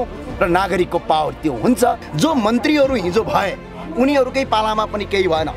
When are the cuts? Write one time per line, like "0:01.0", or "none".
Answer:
0:02.1